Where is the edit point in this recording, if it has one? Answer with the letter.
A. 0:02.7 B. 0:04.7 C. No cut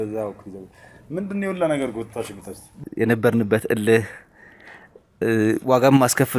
A